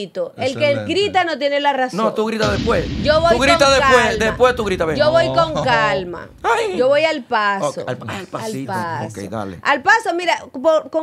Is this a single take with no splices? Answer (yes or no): yes